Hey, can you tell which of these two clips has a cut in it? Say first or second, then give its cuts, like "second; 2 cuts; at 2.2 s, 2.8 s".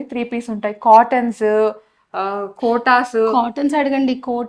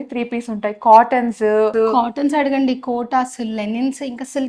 second; 1 cut; at 1.7 s